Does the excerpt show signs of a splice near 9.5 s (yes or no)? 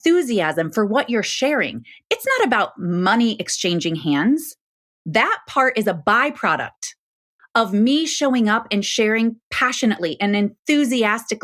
no